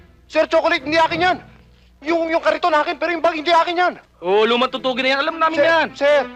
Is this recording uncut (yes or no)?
yes